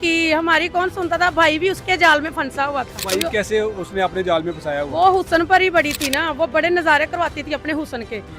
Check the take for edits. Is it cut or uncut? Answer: uncut